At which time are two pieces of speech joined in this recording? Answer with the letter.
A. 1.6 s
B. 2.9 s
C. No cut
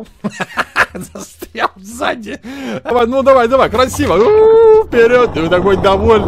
B